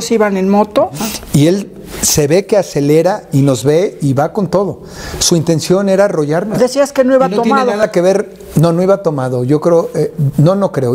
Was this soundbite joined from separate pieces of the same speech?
yes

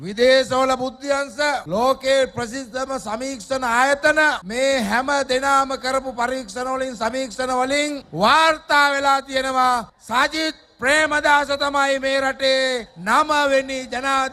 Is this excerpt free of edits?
yes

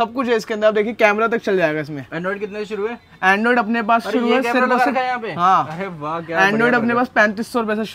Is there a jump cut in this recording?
no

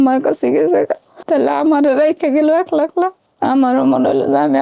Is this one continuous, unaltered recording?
no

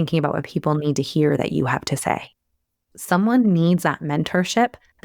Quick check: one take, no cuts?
no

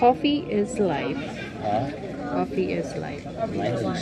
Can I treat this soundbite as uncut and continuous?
yes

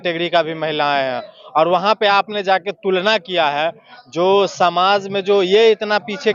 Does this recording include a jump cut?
no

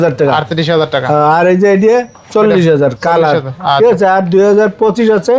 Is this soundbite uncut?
yes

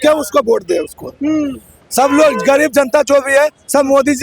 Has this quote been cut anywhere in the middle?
no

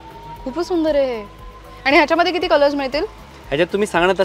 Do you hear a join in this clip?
no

